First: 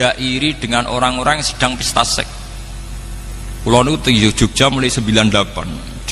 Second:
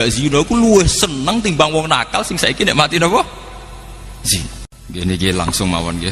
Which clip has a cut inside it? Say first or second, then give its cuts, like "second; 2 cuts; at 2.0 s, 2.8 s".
second; 1 cut; at 4.7 s